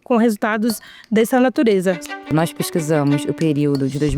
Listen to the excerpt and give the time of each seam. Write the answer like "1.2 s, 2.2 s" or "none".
2.2 s